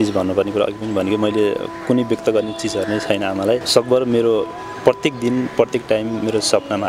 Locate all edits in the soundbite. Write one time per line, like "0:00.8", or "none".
0:03.7